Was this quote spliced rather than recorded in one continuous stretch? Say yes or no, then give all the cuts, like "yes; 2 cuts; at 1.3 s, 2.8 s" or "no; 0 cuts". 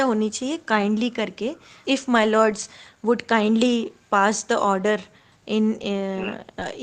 yes; 1 cut; at 1.8 s